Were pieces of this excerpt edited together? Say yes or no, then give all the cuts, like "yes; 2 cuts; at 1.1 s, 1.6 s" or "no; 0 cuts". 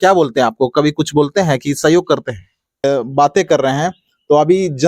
yes; 1 cut; at 2.8 s